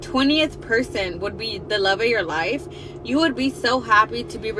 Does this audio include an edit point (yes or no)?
no